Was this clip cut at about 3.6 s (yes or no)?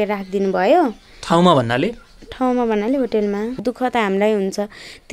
yes